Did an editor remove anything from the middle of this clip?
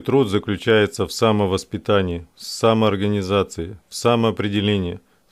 no; 0 cuts

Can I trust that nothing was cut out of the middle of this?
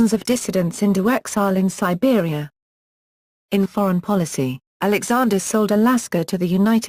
no; 1 cut; at 1.7 s

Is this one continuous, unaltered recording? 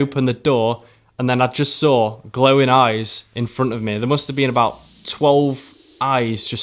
yes; 0 cuts

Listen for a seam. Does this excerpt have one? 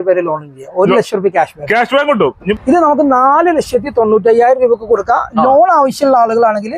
yes; 1 cut; at 2.4 s

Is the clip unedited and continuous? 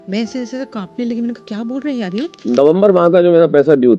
no; 1 cut; at 2.5 s

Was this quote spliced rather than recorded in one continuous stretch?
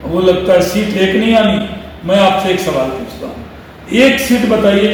no; 0 cuts

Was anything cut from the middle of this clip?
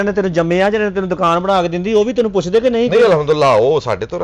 no; 0 cuts

